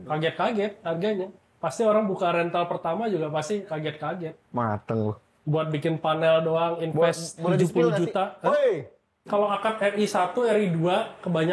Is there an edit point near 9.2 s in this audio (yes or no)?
yes